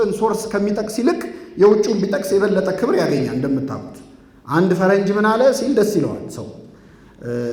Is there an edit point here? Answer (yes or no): no